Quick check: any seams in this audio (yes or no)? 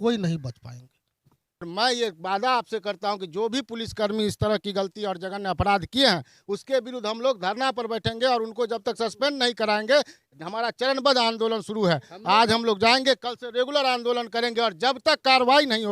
yes